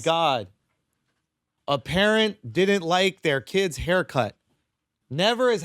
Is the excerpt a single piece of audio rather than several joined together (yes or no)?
yes